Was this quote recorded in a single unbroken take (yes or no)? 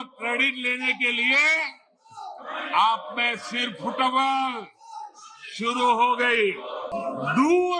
no